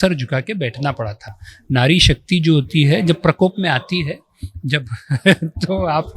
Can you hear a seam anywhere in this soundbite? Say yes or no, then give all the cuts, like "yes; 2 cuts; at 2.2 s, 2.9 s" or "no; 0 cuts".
no; 0 cuts